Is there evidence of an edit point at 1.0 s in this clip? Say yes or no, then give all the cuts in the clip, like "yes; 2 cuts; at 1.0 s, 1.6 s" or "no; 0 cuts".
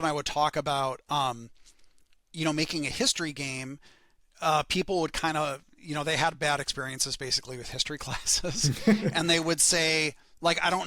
no; 0 cuts